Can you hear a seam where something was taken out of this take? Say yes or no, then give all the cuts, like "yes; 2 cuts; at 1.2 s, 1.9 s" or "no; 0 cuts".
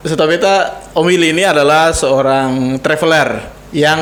no; 0 cuts